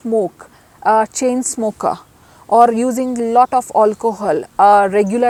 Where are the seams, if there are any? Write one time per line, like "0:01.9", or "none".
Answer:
none